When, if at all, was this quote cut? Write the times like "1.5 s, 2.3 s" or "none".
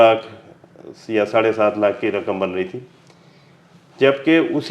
none